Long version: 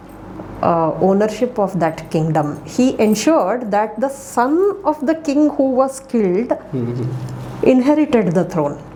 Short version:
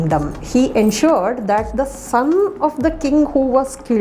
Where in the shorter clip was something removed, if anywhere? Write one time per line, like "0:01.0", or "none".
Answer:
none